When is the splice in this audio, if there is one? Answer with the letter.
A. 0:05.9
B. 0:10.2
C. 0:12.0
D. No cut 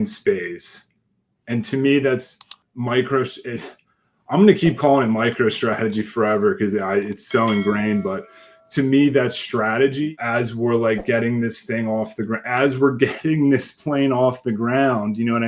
B